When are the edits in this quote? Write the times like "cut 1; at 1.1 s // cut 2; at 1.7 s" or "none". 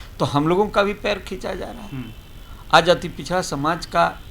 none